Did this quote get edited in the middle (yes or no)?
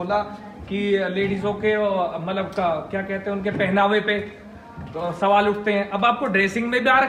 no